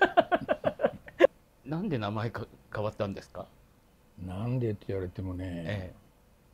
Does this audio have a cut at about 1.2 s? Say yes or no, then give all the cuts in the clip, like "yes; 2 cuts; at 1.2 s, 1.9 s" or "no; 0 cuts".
yes; 1 cut; at 1.2 s